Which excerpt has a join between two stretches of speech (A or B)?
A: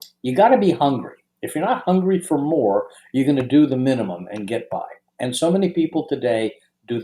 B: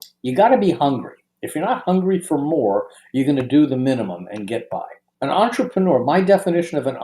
B